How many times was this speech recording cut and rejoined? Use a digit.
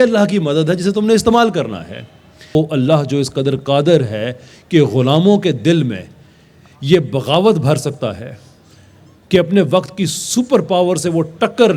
1